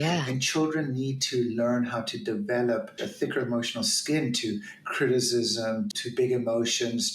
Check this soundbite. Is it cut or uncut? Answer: cut